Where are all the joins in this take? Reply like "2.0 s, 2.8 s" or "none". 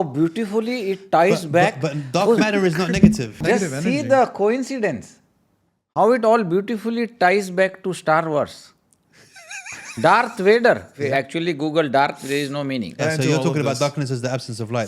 3.4 s, 11.0 s, 13.0 s